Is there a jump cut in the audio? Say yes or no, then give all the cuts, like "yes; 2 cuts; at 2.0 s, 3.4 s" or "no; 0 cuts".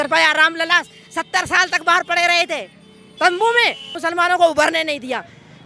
yes; 1 cut; at 3.9 s